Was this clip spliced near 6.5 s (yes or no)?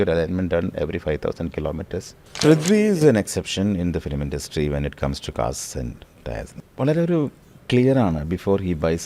yes